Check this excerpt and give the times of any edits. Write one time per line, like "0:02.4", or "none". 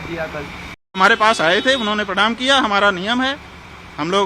0:01.0